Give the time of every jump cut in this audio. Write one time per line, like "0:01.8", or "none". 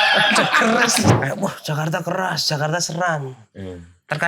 0:01.1